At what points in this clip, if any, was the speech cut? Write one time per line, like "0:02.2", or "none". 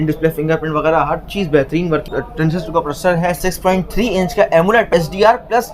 0:02.1
0:03.4
0:04.9